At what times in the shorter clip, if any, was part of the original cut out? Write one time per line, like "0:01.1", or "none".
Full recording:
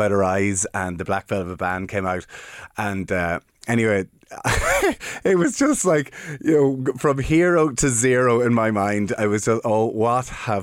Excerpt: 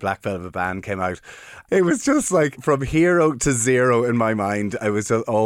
0:01.5
0:02.6